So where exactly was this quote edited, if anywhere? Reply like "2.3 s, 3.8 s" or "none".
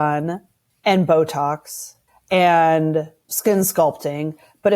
3.2 s